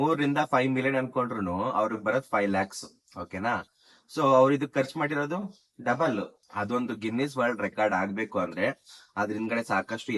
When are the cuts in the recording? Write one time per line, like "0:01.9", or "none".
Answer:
0:06.4